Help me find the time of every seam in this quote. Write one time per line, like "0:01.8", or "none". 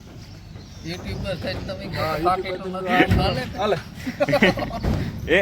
0:03.3